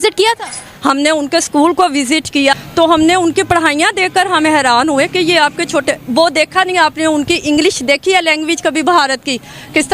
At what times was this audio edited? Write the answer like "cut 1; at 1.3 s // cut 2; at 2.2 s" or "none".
cut 1; at 2.5 s